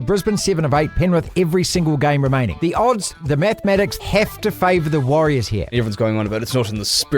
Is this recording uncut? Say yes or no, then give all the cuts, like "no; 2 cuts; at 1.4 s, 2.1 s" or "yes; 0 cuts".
no; 3 cuts; at 2.5 s, 4.0 s, 5.7 s